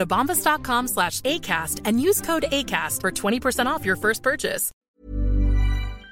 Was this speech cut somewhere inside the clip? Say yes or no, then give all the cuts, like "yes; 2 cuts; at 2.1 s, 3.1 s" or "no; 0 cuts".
yes; 1 cut; at 4.7 s